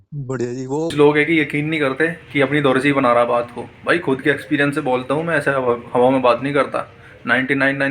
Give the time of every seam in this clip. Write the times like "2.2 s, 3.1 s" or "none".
0.9 s